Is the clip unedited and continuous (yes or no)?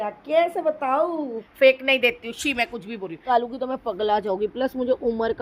no